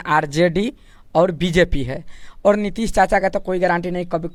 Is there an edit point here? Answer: no; 0 cuts

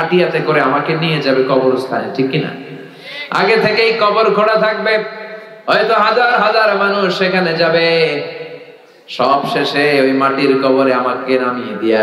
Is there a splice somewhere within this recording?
no; 0 cuts

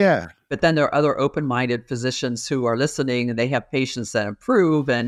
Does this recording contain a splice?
no; 0 cuts

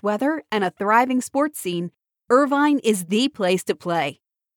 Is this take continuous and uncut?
yes; 0 cuts

